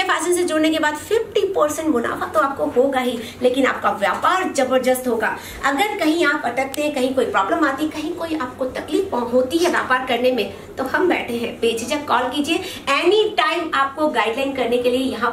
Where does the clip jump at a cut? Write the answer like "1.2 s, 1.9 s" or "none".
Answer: none